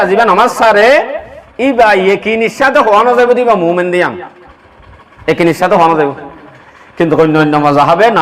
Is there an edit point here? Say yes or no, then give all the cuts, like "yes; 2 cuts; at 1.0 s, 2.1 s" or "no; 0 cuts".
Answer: no; 0 cuts